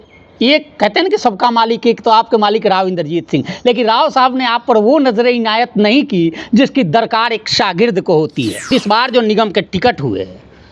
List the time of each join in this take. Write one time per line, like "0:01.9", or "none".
0:08.7